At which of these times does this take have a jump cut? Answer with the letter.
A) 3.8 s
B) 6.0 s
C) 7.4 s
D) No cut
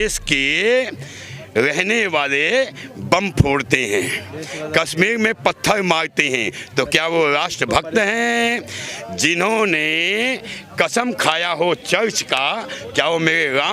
D